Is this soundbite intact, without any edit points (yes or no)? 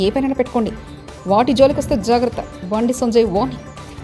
yes